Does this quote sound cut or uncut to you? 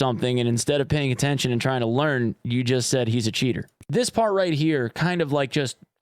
cut